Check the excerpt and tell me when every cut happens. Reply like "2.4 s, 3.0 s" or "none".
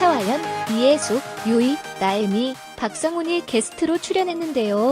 none

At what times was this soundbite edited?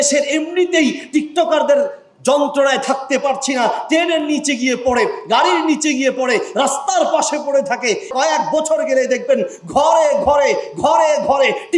8.1 s

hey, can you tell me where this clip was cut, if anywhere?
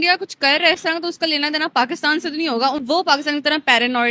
2.8 s

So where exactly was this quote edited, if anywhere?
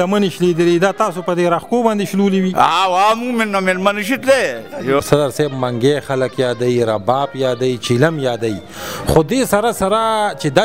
5.0 s

